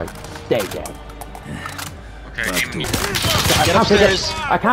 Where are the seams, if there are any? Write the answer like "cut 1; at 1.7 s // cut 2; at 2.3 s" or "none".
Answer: cut 1; at 2.8 s